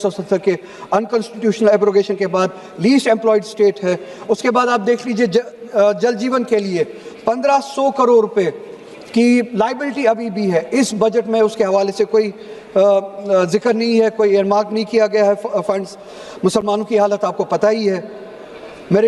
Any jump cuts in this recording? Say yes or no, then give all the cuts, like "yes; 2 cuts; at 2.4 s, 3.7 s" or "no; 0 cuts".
no; 0 cuts